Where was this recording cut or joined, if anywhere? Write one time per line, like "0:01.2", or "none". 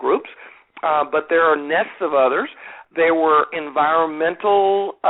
0:02.7